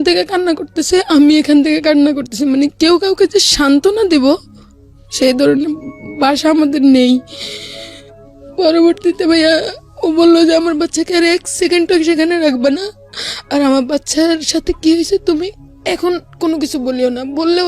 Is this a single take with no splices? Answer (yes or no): yes